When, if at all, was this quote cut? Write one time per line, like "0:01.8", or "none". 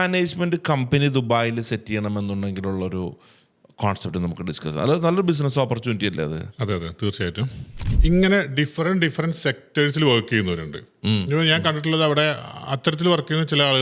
0:07.8

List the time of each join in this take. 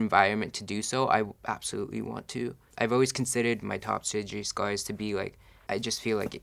0:02.7
0:05.5

